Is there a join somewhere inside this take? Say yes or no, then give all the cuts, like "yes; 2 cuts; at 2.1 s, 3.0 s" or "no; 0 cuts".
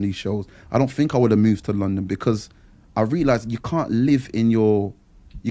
no; 0 cuts